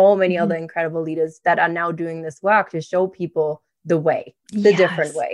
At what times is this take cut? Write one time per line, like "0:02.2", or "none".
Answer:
0:04.4